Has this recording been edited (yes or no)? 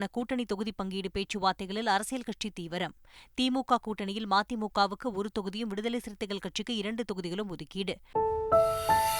yes